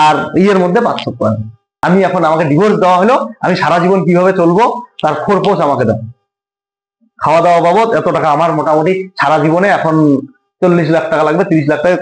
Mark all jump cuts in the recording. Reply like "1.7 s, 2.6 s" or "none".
1.7 s